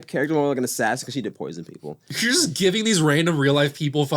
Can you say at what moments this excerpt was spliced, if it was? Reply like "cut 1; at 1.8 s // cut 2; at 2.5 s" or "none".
cut 1; at 2.1 s